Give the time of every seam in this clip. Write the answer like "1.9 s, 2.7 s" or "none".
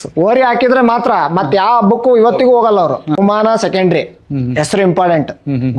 3.2 s

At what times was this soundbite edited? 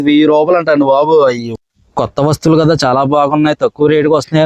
1.5 s

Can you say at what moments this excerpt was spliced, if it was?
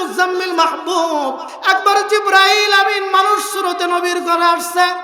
1.5 s

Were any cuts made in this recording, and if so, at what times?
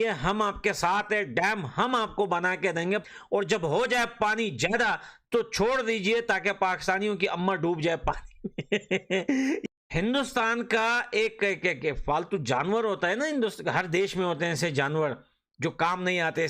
3.0 s, 9.6 s

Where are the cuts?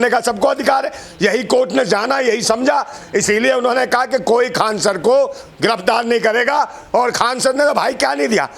none

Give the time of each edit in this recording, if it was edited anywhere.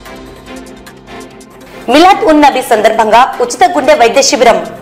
1.6 s

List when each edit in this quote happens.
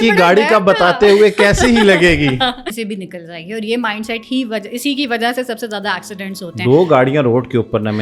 2.7 s

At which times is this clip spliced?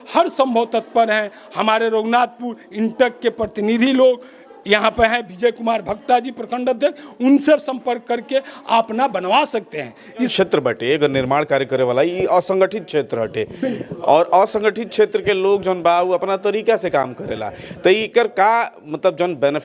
10.3 s

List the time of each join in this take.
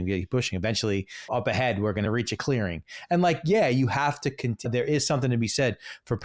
1.2 s, 2.1 s, 4.7 s

